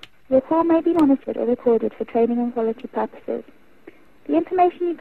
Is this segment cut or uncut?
uncut